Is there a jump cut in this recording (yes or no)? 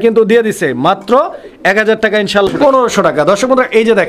yes